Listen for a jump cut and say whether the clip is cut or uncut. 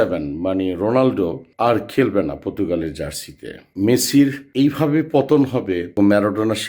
cut